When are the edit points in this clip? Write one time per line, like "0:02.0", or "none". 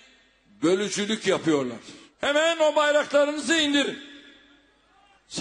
0:01.1